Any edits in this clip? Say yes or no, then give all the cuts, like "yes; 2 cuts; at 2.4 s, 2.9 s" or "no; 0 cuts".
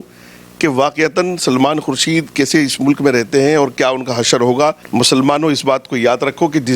yes; 1 cut; at 4.8 s